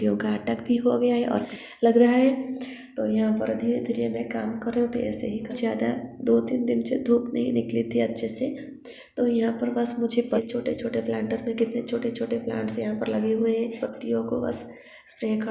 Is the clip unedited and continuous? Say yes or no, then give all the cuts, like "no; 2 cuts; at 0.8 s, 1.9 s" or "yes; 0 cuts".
no; 4 cuts; at 1.5 s, 5.5 s, 10.4 s, 13.8 s